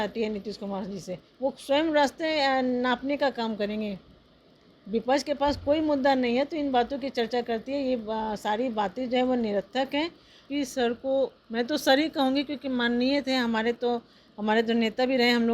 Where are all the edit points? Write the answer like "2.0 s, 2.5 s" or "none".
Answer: 10.4 s